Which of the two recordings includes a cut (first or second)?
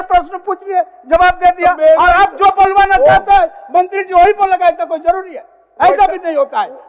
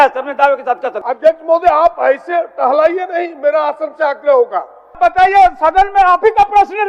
second